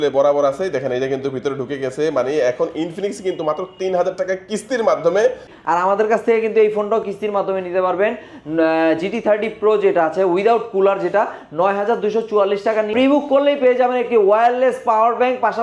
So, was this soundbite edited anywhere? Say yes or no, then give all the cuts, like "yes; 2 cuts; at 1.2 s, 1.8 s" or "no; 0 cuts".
yes; 2 cuts; at 5.5 s, 12.9 s